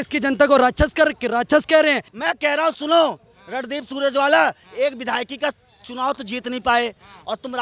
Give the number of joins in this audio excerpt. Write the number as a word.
one